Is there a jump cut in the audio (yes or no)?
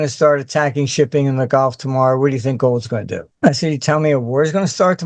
no